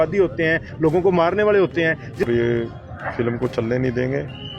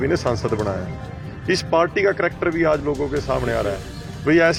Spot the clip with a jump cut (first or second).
first